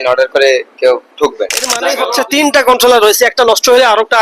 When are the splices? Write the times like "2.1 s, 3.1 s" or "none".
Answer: 2.0 s